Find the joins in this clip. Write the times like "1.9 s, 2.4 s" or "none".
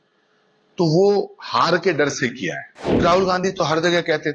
3.0 s